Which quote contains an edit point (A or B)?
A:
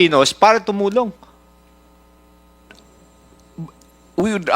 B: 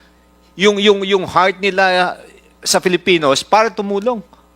A